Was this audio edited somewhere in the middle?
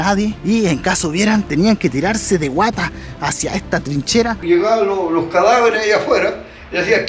yes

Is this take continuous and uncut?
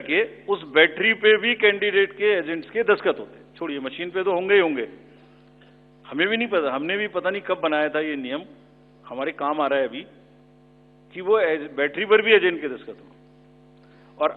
yes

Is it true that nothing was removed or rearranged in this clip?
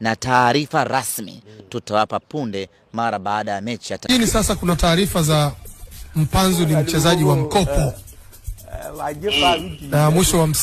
no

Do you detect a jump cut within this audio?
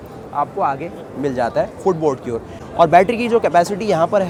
no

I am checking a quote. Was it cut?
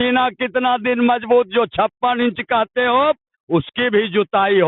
no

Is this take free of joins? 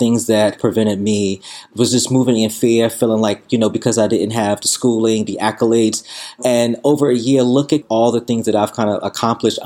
no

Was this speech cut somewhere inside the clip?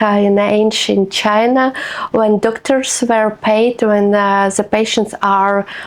no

